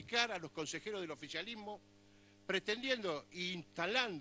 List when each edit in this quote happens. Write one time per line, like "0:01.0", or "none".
none